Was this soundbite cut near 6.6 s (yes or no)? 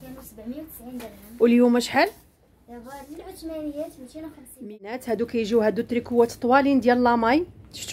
no